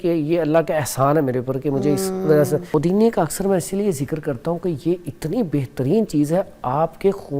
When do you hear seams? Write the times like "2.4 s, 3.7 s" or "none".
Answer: 2.7 s